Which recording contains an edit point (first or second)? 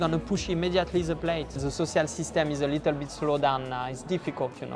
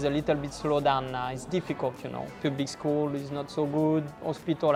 first